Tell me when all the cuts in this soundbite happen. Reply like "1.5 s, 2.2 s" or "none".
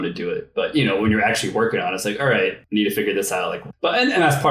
2.6 s, 3.6 s